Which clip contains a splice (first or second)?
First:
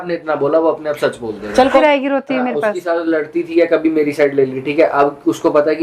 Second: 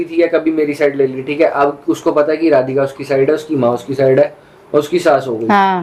first